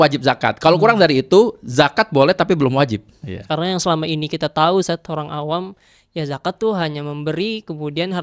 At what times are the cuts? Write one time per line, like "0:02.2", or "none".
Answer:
0:03.3